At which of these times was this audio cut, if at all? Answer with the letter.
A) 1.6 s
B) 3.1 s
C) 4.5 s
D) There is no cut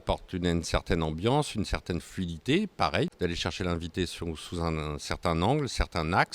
B